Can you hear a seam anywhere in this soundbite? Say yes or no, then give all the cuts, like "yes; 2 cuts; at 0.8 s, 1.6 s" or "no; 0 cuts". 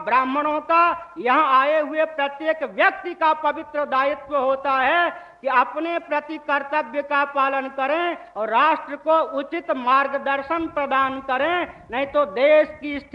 no; 0 cuts